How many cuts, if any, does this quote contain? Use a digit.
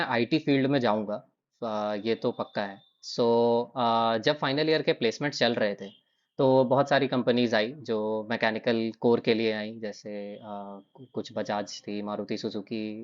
0